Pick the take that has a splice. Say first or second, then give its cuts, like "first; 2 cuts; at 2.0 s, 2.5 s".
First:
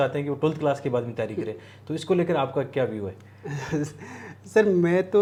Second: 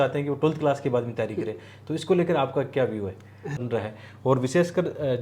second; 1 cut; at 3.6 s